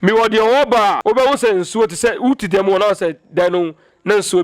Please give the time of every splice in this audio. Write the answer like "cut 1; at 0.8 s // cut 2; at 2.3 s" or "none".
cut 1; at 1.0 s

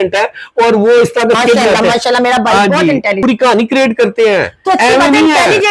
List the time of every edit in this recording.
cut 1; at 3.2 s

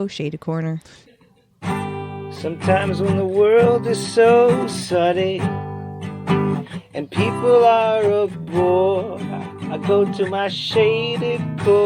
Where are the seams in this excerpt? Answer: cut 1; at 1.0 s

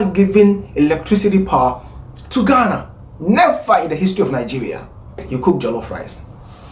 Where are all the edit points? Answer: cut 1; at 5.3 s

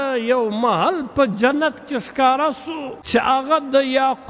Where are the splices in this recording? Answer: cut 1; at 2.9 s

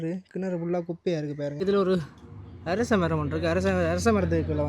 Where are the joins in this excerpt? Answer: cut 1; at 1.5 s

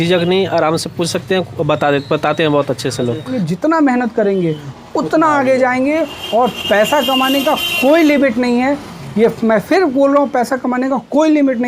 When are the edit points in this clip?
cut 1; at 3.3 s

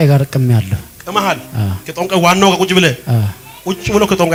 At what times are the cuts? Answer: none

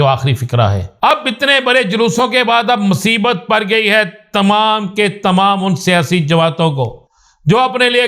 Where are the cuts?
cut 1; at 1.1 s

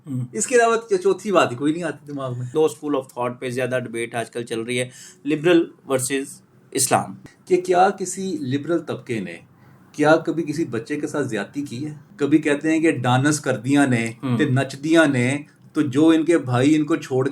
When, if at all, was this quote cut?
cut 1; at 2.5 s // cut 2; at 7.2 s // cut 3; at 12.0 s

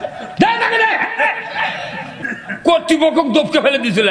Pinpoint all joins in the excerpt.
cut 1; at 2.2 s

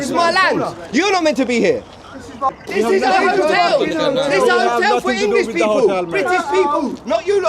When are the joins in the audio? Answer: cut 1; at 2.6 s

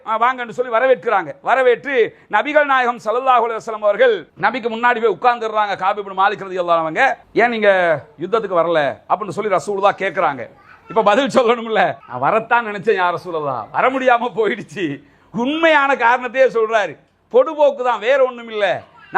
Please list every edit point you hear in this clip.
none

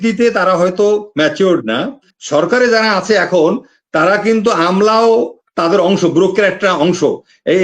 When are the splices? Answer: cut 1; at 2.1 s

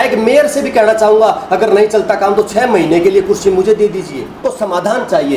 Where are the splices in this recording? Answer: cut 1; at 4.4 s

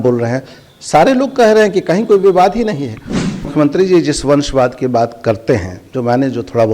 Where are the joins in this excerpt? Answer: cut 1; at 3.5 s

